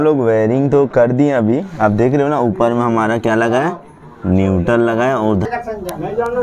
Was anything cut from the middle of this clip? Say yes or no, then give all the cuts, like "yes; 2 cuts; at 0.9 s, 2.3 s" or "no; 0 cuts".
yes; 1 cut; at 5.4 s